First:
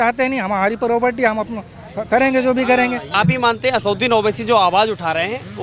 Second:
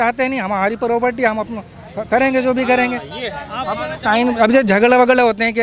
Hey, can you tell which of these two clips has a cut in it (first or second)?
first